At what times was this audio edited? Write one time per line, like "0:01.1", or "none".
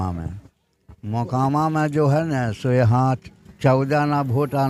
none